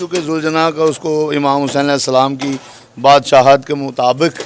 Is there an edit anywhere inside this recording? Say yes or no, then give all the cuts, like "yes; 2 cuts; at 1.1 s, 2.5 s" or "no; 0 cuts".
no; 0 cuts